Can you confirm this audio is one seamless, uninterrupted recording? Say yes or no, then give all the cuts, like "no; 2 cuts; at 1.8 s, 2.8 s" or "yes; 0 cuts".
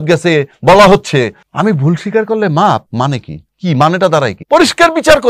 no; 3 cuts; at 1.4 s, 2.9 s, 4.4 s